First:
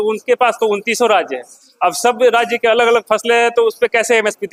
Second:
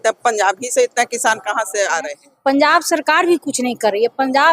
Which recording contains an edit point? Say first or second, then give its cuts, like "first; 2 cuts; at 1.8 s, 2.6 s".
second; 1 cut; at 2.2 s